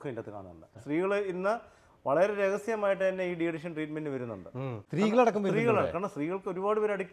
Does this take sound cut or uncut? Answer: cut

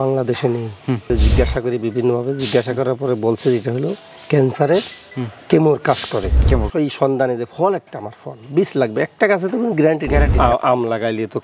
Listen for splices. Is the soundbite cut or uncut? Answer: cut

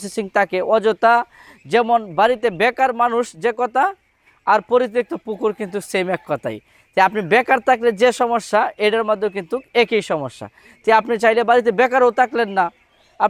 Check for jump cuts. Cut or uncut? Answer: uncut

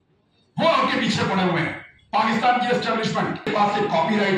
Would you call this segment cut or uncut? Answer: cut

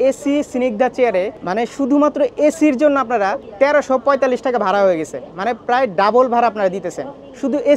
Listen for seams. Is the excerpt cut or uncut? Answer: cut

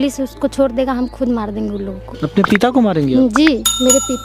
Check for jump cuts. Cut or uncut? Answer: cut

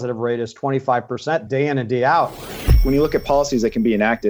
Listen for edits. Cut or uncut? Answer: cut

